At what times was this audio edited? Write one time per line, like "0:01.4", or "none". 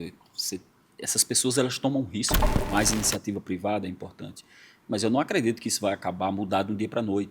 0:02.6